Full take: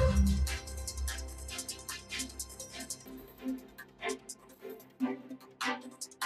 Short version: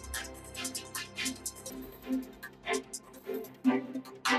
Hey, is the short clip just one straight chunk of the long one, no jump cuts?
no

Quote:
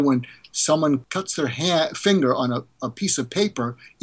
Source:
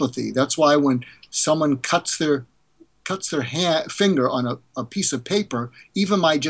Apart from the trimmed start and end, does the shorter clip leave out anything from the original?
yes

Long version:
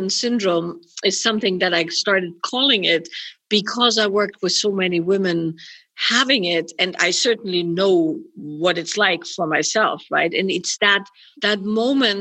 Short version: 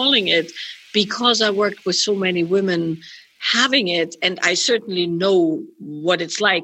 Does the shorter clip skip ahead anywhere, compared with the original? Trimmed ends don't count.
no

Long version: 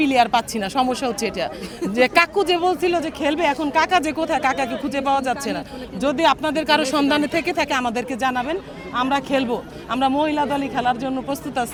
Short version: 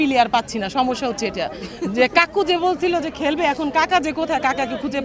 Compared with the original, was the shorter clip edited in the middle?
no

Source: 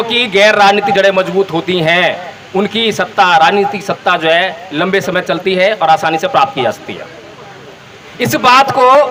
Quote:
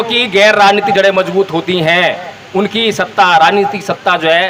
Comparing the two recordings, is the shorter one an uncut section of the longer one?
yes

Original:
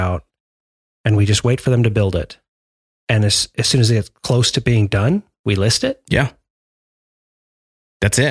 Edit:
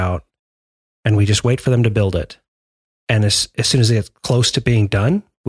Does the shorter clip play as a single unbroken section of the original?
yes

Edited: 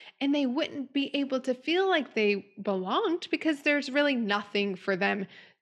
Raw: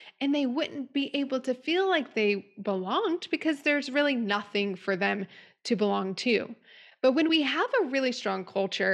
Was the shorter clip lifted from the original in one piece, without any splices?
yes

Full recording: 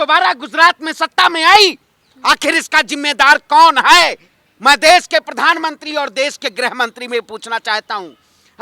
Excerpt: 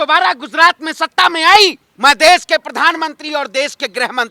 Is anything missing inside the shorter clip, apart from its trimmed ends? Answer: yes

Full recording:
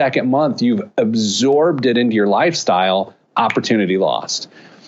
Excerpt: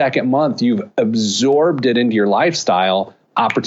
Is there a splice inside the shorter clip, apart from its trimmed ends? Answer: no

